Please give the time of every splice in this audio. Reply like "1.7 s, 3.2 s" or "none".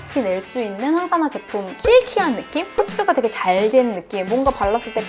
1.8 s